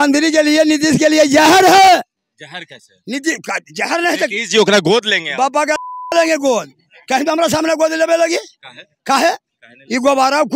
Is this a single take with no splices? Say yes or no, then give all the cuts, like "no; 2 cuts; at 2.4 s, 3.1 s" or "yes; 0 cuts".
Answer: yes; 0 cuts